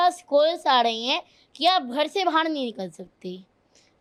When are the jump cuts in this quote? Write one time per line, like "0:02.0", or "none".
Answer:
none